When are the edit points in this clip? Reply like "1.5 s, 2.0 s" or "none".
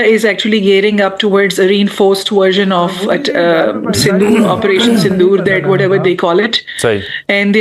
none